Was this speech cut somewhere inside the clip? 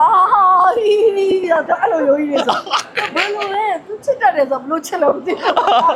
no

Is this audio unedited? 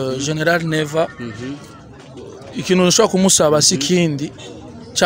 yes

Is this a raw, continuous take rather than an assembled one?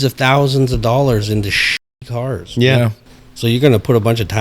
no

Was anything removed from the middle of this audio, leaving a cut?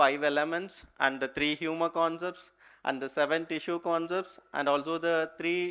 no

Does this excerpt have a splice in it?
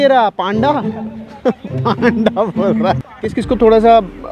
yes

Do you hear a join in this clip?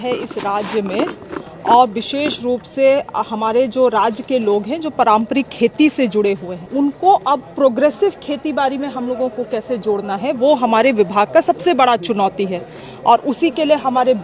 no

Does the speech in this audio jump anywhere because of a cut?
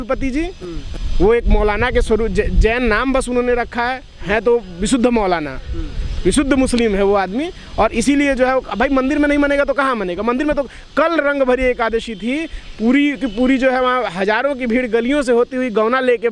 no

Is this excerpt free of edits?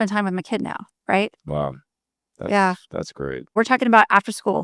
no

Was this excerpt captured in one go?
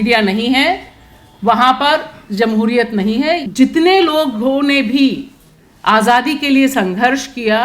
no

